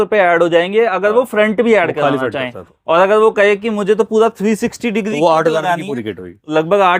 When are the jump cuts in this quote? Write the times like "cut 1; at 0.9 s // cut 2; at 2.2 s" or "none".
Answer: none